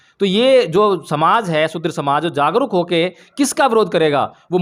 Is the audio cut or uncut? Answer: uncut